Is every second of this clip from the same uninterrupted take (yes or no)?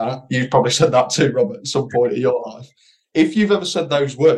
yes